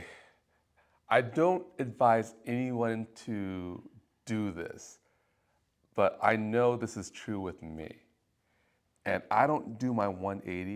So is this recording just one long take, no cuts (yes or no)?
yes